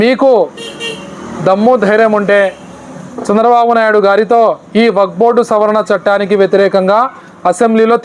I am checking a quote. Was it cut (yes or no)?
no